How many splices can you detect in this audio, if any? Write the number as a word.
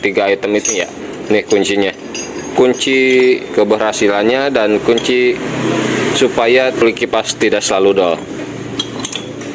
one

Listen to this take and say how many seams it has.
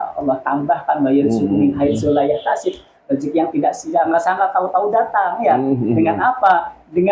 zero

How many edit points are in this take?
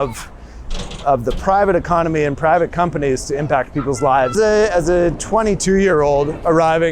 one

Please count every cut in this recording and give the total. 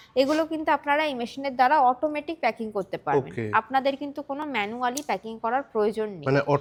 zero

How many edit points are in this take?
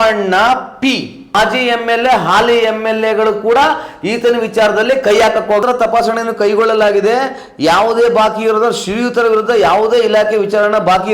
two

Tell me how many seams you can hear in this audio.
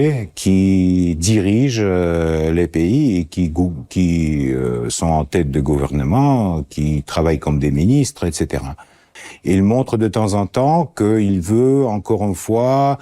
one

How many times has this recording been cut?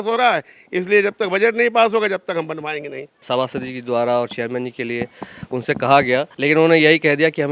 one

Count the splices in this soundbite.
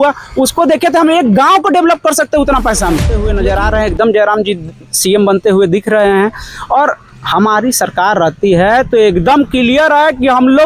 one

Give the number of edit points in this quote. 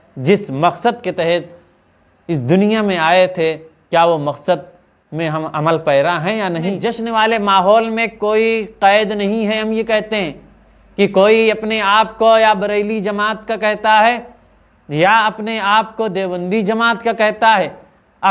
one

